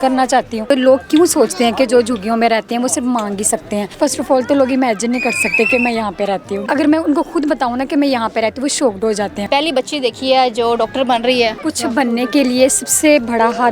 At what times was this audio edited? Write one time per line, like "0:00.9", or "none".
0:00.7
0:03.9
0:06.6
0:09.4
0:11.6